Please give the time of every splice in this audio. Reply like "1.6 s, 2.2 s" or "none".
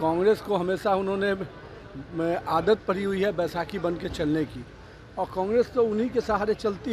none